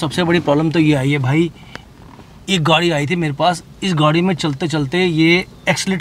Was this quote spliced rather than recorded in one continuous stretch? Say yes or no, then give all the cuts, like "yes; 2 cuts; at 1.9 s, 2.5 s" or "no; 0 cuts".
no; 0 cuts